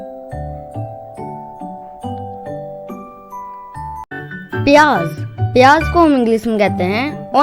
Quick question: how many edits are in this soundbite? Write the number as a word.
one